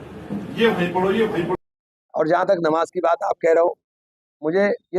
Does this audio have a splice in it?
yes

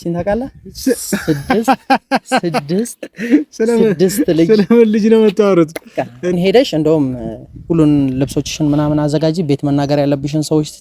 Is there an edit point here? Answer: yes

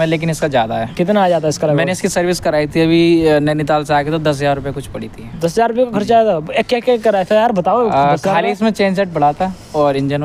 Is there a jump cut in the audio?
no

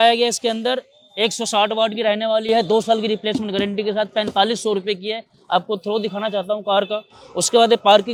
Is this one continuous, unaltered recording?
yes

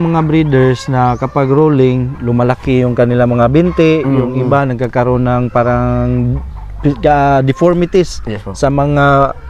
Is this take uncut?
yes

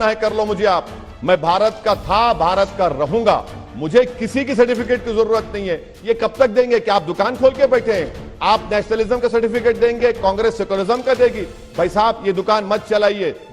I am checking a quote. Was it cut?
no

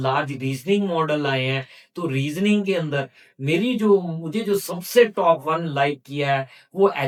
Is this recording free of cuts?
yes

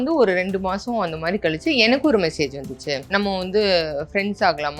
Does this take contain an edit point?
yes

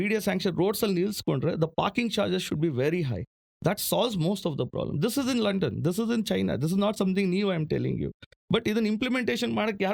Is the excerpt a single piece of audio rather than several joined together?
yes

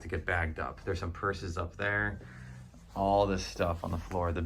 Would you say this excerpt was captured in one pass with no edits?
yes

